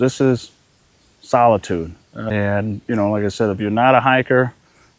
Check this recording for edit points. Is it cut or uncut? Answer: cut